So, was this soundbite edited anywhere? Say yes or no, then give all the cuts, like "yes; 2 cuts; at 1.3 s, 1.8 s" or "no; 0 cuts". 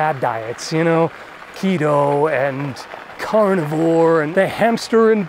yes; 1 cut; at 4.3 s